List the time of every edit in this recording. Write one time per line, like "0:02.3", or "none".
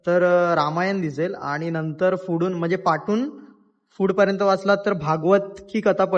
none